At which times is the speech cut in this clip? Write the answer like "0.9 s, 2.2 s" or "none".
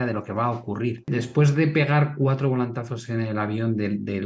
1.0 s